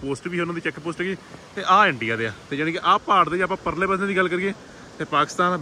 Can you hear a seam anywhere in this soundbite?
no; 0 cuts

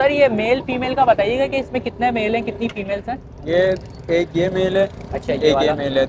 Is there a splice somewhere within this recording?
no; 0 cuts

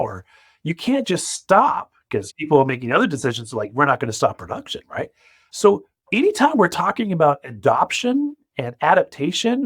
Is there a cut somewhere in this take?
yes; 1 cut; at 2.3 s

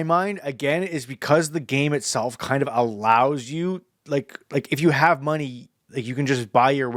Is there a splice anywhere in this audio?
no; 0 cuts

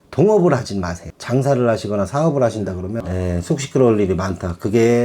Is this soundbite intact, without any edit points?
no; 1 cut; at 3.1 s

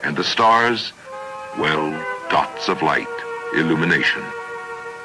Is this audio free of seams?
no; 1 cut; at 0.9 s

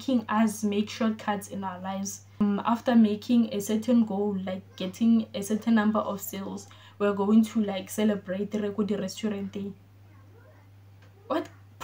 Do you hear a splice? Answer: yes; 1 cut; at 2.4 s

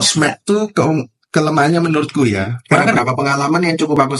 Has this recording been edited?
yes; 1 cut; at 3.0 s

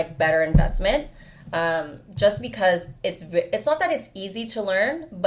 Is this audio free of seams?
yes; 0 cuts

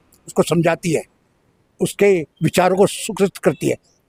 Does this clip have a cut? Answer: no; 0 cuts

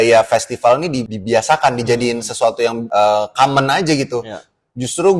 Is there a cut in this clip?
yes; 2 cuts; at 1.1 s, 2.8 s

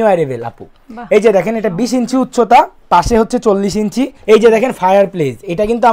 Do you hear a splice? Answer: yes; 1 cut; at 4.2 s

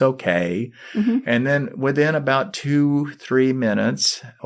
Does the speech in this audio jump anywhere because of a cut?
no; 0 cuts

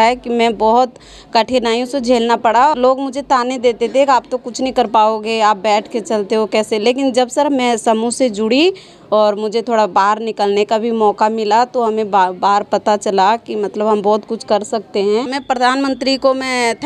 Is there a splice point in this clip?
yes; 2 cuts; at 2.7 s, 15.4 s

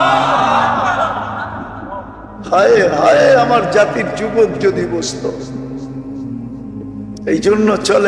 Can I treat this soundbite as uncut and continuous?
no; 2 cuts; at 5.4 s, 6.8 s

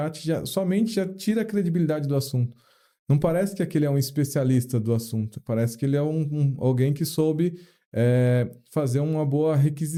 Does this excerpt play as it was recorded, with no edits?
yes; 0 cuts

